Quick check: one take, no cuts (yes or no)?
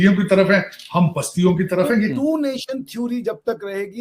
no